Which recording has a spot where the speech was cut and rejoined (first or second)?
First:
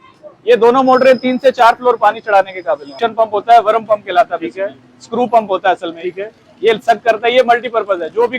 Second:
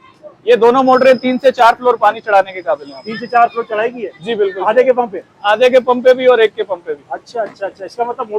first